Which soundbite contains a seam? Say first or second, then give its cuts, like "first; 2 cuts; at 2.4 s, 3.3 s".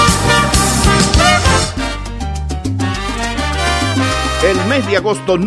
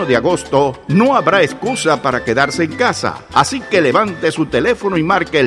first; 1 cut; at 1.7 s